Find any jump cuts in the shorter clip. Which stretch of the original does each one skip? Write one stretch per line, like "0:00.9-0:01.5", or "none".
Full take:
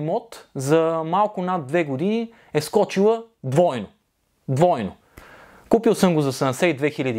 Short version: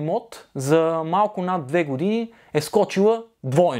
none

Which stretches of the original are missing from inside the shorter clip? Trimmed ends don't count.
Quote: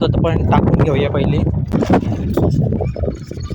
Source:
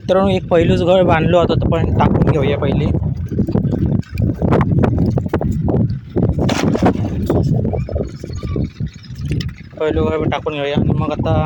0:03.2-0:06.6

